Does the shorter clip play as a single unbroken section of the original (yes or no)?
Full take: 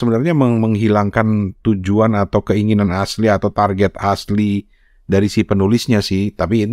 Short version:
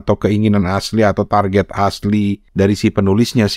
no